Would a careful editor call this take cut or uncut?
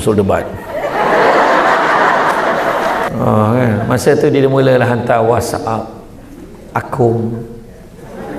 cut